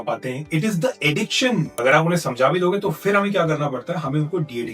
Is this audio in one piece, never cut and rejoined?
no; 1 cut; at 1.7 s

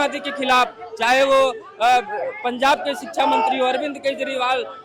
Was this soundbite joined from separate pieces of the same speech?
no; 0 cuts

